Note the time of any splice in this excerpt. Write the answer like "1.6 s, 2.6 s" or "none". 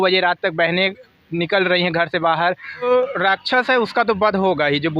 2.9 s